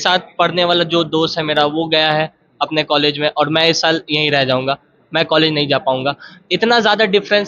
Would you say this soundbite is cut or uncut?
uncut